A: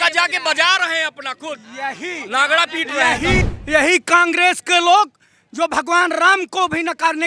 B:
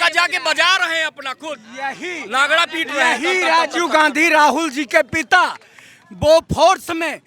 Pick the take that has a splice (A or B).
A